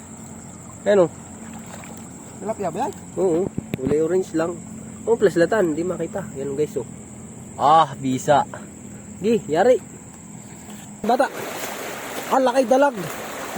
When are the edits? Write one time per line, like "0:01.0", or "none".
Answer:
0:11.0

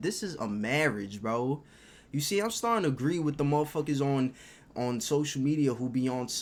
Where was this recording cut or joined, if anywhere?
none

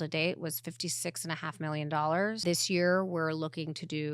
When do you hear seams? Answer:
0:02.4

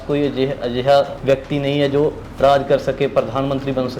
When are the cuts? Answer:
0:01.1

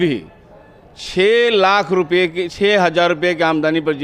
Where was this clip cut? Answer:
none

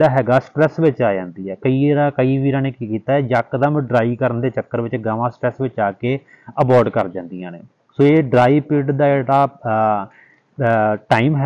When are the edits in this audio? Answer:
none

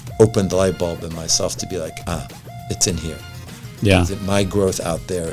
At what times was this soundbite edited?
none

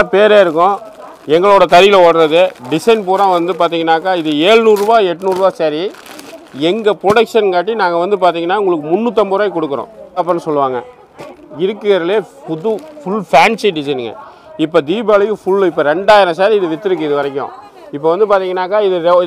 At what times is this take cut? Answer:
0:10.2

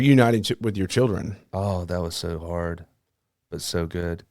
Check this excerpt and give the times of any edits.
0:01.5

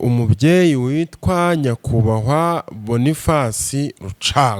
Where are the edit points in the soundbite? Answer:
none

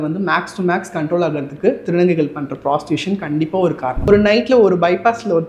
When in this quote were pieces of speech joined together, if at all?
0:04.1

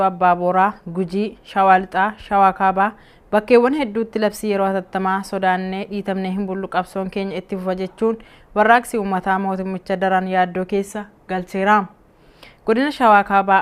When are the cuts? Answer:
none

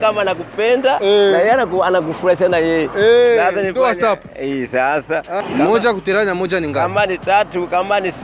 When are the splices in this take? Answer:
0:05.4

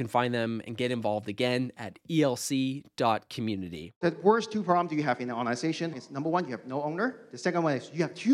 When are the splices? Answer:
0:04.0
0:05.9

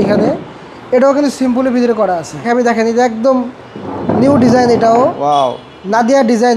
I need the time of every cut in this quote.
0:02.4

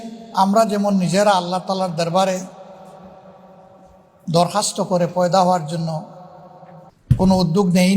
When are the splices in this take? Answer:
0:06.9

